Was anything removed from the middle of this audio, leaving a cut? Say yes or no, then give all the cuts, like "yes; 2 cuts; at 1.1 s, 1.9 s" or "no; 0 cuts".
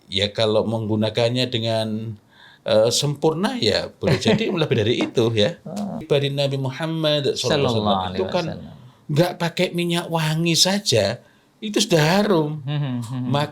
yes; 1 cut; at 6.0 s